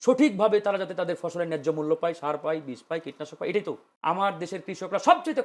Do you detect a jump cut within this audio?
yes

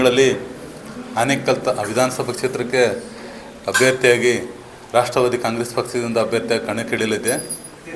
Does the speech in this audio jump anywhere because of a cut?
no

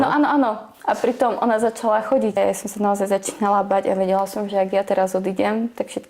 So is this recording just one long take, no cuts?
no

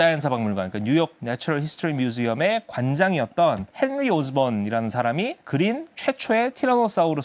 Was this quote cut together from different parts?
no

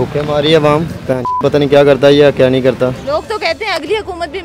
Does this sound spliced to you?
yes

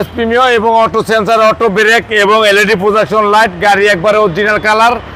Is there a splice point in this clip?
no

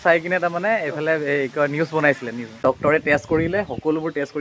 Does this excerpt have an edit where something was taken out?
yes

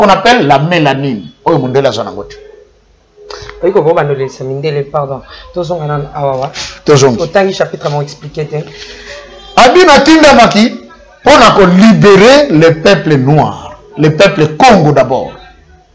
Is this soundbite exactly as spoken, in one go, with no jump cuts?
yes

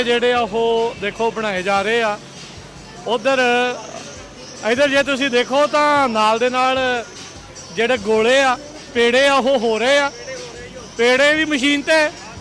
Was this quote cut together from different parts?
no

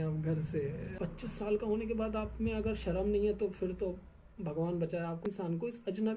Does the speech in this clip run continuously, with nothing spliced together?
no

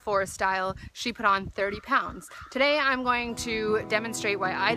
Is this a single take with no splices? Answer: no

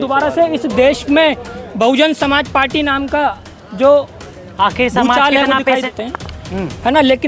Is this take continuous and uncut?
no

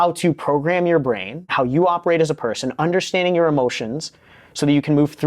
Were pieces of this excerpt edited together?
yes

